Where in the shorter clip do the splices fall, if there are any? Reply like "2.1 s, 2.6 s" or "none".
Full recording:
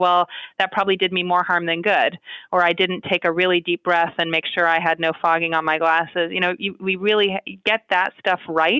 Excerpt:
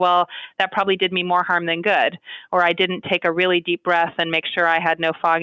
none

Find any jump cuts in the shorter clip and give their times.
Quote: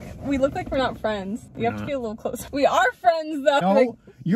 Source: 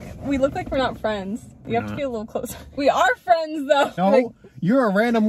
1.5 s, 2.4 s, 3.6 s

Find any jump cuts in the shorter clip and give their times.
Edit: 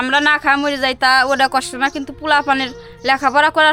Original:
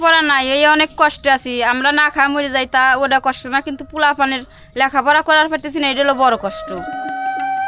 none

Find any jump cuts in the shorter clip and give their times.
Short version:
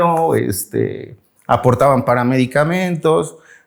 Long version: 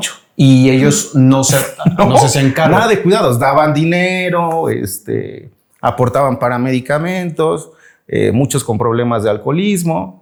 none

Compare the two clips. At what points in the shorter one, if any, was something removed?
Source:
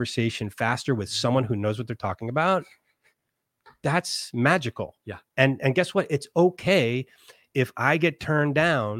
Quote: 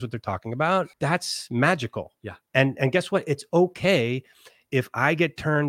0.9 s

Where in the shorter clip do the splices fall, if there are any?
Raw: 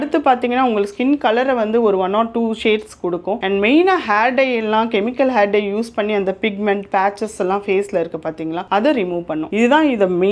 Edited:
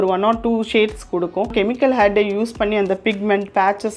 1.5 s

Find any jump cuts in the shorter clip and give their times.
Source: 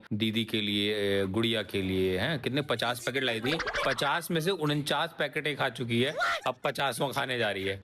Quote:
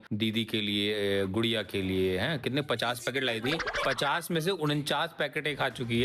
none

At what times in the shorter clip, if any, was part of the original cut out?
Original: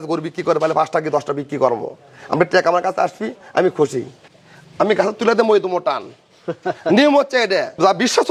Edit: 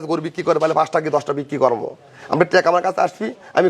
none

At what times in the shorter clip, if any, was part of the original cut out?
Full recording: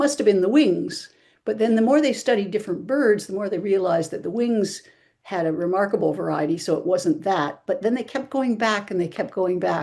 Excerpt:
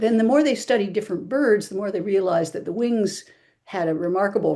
none

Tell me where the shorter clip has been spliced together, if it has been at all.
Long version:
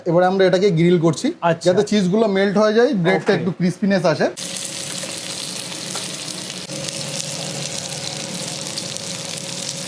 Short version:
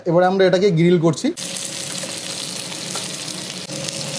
1.4 s

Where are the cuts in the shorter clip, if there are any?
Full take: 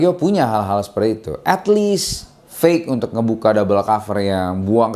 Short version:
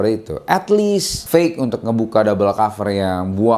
1.1 s

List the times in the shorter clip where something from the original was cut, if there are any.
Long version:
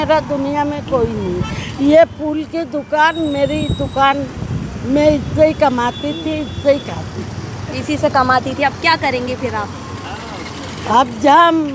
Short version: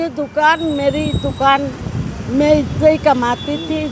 none

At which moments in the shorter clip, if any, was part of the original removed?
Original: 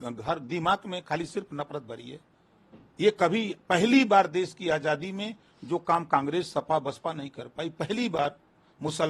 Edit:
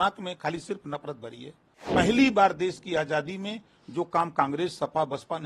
1.8 s

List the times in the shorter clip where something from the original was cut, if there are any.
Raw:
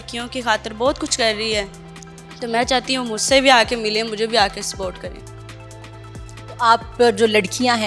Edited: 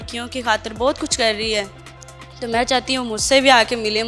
none

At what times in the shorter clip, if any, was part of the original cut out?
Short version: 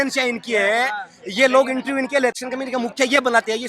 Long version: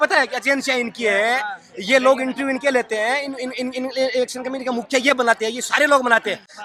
2.4 s

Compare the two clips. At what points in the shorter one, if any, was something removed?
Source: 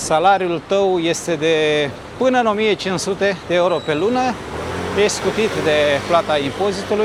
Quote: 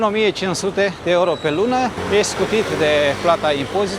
2.0 s

